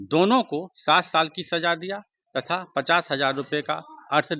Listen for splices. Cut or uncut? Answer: uncut